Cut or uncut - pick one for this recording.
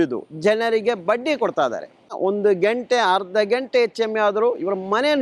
uncut